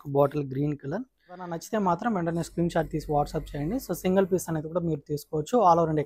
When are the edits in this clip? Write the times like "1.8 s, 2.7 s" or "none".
1.6 s

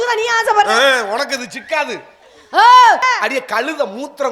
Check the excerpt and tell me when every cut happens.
3.0 s

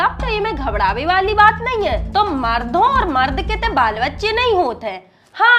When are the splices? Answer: none

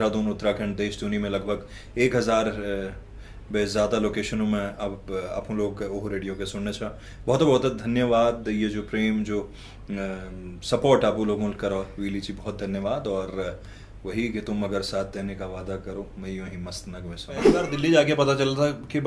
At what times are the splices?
17.7 s

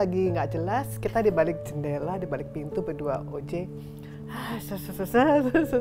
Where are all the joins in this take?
none

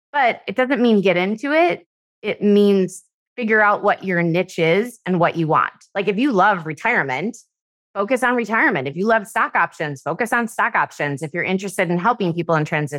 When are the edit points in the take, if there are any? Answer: none

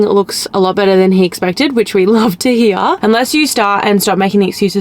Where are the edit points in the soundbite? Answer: 3.0 s

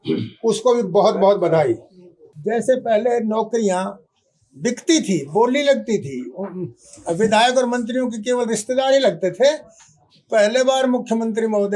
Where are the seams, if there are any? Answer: 2.3 s

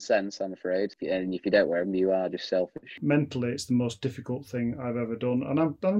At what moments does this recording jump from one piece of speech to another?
1.0 s, 3.0 s

